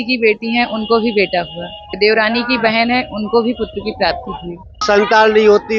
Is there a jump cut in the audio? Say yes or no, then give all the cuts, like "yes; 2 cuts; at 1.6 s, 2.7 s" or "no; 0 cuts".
yes; 2 cuts; at 1.9 s, 4.8 s